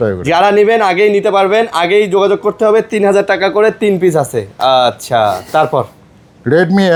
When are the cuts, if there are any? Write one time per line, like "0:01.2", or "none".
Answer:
none